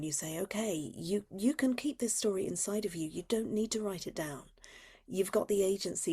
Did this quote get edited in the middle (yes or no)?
no